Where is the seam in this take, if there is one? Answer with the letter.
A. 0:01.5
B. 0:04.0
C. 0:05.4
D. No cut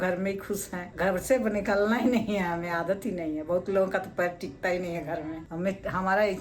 C